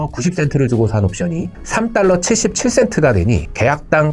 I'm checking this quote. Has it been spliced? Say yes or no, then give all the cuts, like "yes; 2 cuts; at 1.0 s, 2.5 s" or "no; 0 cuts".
no; 0 cuts